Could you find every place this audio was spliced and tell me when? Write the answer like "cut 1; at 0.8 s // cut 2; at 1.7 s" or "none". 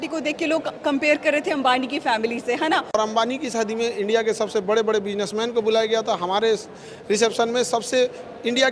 cut 1; at 3.0 s